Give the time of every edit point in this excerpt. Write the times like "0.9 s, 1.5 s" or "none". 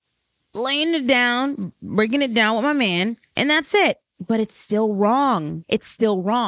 5.6 s